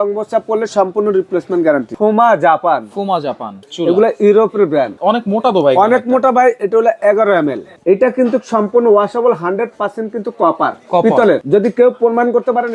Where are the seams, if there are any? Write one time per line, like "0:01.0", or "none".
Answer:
0:01.9
0:03.6
0:05.0
0:07.7
0:11.4